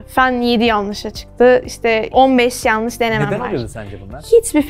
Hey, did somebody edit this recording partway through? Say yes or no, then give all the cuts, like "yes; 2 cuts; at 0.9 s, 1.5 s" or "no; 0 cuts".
no; 0 cuts